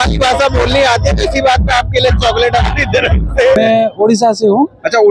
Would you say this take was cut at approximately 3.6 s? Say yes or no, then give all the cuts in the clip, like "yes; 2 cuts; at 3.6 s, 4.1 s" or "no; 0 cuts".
yes; 1 cut; at 3.6 s